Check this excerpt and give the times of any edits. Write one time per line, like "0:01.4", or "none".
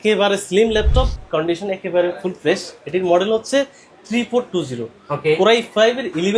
0:01.2